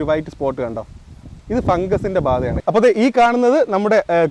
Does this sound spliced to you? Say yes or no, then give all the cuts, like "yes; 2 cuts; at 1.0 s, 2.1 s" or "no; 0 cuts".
yes; 1 cut; at 2.5 s